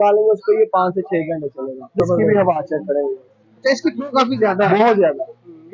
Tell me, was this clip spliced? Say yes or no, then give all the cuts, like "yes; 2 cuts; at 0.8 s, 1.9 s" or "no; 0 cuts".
yes; 1 cut; at 1.9 s